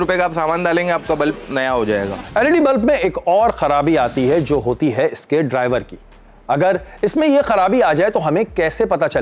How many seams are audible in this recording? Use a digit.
0